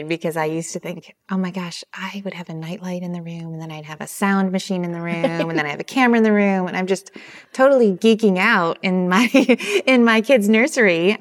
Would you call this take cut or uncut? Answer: uncut